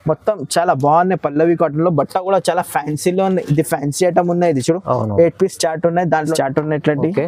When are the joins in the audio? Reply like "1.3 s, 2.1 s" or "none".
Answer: 6.3 s